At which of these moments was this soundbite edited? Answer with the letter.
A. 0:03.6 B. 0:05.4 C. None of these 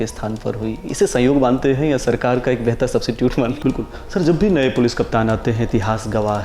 A